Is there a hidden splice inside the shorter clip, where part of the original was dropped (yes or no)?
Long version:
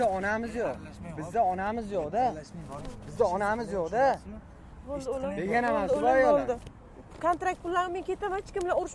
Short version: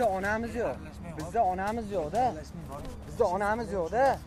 no